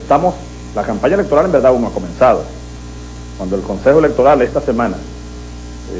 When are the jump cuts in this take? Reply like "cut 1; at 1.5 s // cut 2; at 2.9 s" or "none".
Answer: cut 1; at 1.6 s